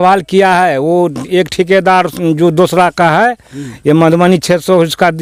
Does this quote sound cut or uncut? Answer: uncut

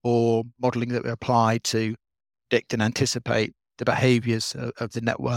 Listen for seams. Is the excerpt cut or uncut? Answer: uncut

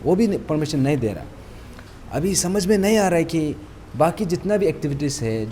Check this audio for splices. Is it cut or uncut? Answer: uncut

